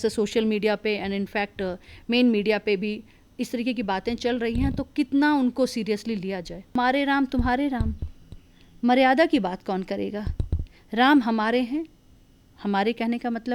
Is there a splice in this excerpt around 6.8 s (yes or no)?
yes